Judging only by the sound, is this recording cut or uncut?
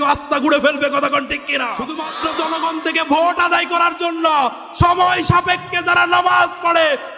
cut